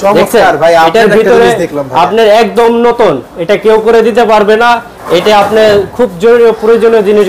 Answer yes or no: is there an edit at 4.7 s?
no